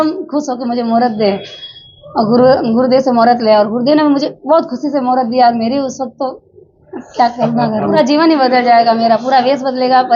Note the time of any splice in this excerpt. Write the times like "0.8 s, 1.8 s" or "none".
8.0 s